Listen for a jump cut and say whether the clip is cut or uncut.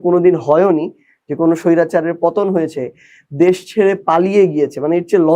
uncut